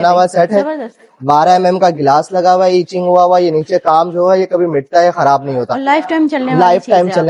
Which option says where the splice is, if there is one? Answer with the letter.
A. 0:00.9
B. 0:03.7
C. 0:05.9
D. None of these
D